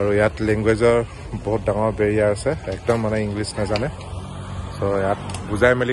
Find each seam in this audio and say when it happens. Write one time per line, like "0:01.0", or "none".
none